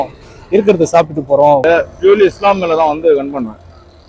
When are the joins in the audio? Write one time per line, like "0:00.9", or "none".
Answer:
0:01.6